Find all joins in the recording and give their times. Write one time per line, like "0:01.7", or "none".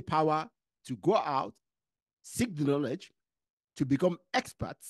none

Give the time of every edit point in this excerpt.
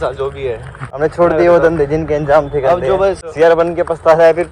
0:00.9
0:03.2

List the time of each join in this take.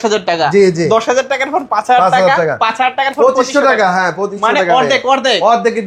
none

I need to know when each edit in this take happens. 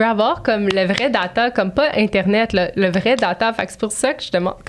none

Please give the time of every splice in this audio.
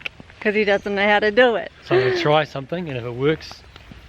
0:01.7

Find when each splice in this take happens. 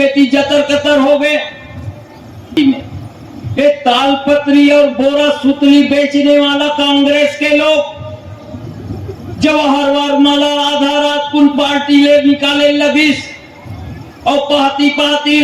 0:02.6

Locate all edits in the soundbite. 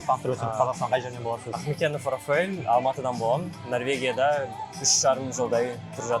none

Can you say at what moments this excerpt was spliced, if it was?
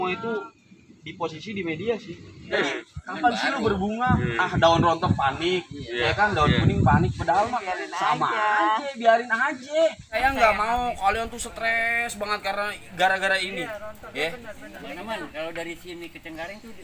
0:02.5
0:10.1
0:14.7

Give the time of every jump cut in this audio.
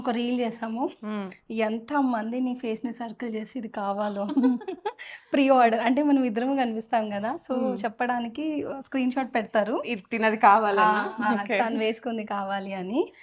none

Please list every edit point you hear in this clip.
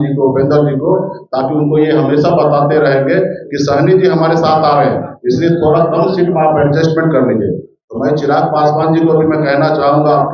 none

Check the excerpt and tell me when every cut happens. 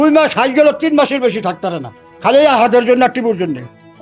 none

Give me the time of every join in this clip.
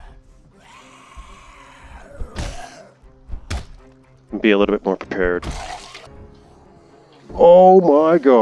0:06.0

